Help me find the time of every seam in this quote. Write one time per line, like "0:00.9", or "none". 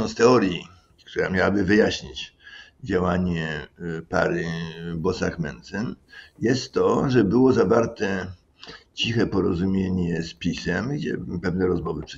none